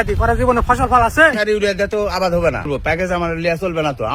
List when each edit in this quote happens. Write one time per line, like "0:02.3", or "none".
0:01.4
0:02.7